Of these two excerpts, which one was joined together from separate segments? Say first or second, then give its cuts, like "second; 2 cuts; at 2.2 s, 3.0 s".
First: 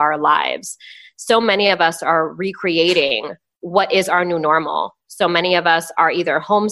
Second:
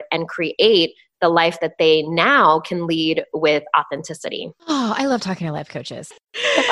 second; 2 cuts; at 4.5 s, 5.8 s